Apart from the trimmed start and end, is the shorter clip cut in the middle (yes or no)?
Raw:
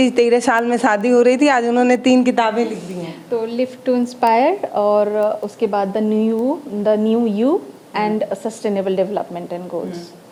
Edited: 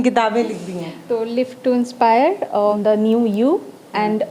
yes